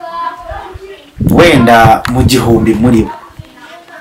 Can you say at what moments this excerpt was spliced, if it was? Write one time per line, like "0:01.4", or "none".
none